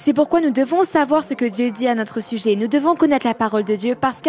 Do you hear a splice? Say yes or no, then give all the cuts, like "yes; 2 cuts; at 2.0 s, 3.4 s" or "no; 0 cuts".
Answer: no; 0 cuts